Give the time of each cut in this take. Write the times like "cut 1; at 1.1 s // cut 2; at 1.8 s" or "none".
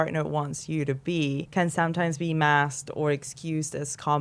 cut 1; at 1.5 s